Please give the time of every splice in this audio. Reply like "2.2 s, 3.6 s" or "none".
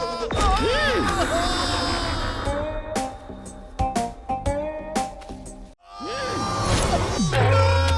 2.4 s, 5.9 s